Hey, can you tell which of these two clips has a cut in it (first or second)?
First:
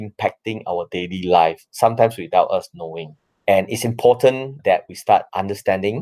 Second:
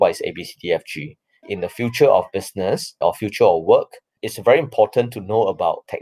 second